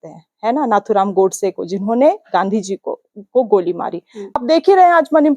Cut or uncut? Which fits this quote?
cut